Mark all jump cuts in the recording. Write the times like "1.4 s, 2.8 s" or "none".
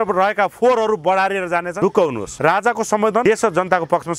1.7 s, 2.3 s, 3.2 s